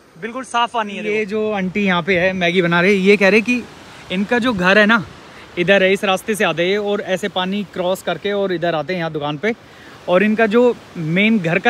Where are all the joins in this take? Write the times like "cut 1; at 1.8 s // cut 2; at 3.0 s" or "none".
cut 1; at 1.2 s